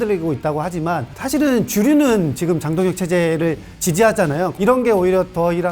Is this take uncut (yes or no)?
no